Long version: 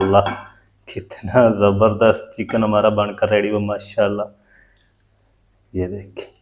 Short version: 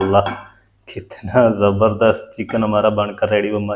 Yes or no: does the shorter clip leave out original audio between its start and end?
no